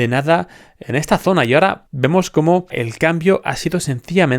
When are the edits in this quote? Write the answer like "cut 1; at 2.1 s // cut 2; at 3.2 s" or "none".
cut 1; at 1.9 s // cut 2; at 2.8 s

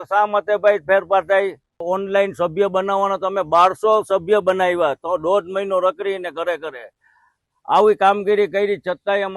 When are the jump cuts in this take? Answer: cut 1; at 1.8 s

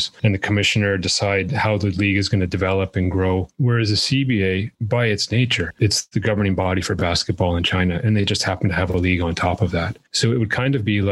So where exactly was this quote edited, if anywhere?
cut 1; at 3.5 s // cut 2; at 4.8 s // cut 3; at 5.7 s // cut 4; at 10.0 s

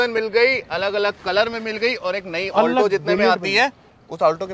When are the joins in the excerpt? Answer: none

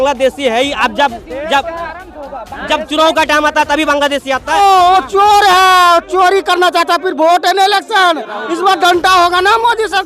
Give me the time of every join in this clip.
cut 1; at 4.6 s

